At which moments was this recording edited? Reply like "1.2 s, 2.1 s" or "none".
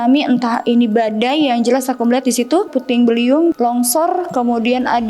2.7 s, 3.5 s